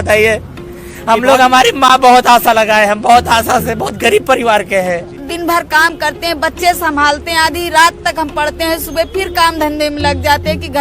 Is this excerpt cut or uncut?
cut